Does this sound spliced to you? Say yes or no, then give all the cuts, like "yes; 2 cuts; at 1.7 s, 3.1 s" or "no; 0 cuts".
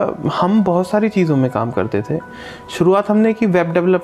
no; 0 cuts